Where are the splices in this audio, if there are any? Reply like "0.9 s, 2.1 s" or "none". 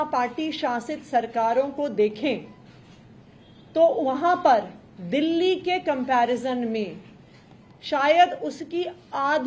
none